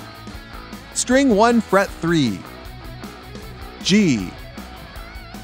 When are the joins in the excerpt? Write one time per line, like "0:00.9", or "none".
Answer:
none